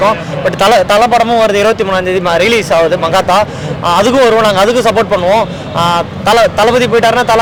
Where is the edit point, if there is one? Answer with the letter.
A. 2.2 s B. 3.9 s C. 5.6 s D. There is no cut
D